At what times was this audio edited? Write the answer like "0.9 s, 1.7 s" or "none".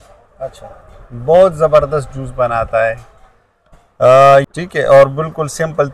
4.5 s